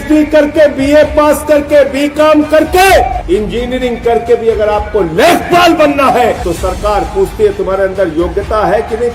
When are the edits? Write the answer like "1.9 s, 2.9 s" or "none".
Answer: 3.2 s, 6.4 s